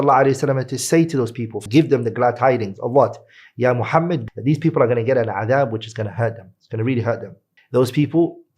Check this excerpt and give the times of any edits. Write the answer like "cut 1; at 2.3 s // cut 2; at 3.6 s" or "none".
cut 1; at 1.6 s // cut 2; at 4.2 s